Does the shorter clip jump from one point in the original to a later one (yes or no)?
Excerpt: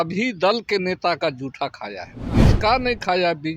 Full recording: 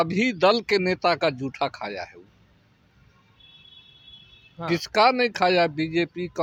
yes